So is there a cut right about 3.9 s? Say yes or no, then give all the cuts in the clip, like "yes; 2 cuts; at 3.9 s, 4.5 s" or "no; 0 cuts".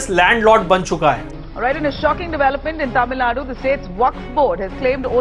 no; 1 cut; at 1.2 s